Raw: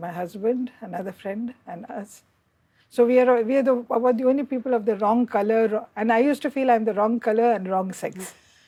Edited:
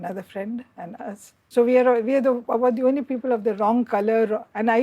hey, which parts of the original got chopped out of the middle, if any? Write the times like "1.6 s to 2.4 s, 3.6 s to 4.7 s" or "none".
2.2 s to 2.7 s